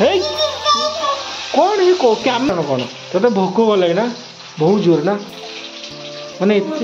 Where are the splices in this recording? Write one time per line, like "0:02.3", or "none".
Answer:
0:02.5